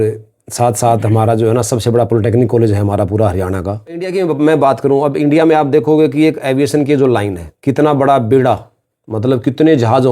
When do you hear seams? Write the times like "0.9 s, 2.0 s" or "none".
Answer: 4.1 s

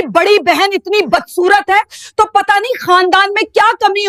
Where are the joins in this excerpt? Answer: none

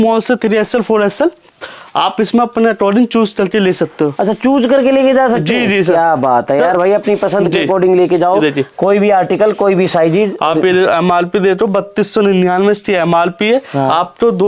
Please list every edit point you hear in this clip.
none

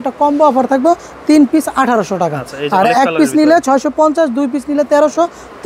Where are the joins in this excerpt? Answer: none

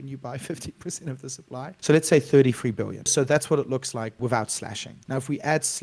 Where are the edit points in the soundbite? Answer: 1.8 s, 3.1 s, 4.2 s, 4.9 s

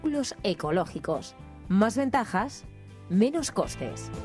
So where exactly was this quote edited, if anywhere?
none

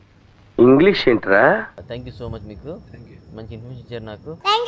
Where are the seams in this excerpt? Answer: 1.8 s

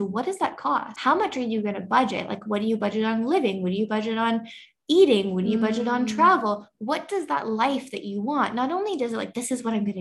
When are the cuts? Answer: 0.9 s

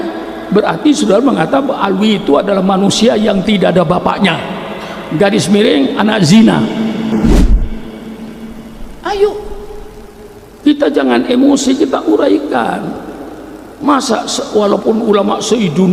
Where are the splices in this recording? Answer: none

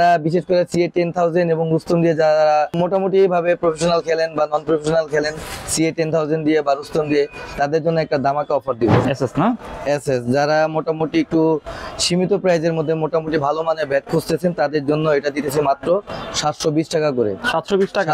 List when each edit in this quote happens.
2.8 s, 9.0 s

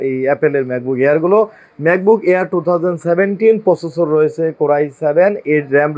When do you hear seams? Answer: none

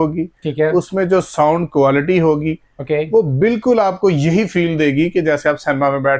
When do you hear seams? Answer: none

